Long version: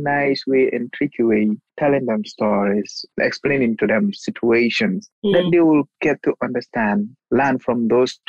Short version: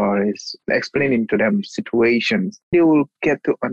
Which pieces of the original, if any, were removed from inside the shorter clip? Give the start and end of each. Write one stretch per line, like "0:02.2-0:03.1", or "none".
0:05.2-0:05.5